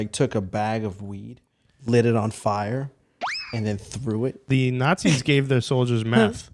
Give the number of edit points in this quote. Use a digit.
1